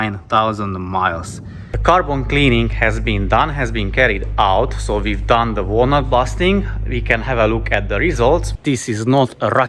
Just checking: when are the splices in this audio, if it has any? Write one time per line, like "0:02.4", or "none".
0:01.7
0:08.5